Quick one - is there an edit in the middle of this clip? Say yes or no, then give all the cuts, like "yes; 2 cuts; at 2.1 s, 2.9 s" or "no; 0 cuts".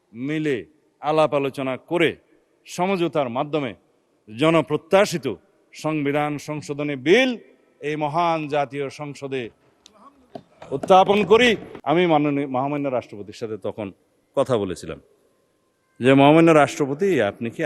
yes; 1 cut; at 11.7 s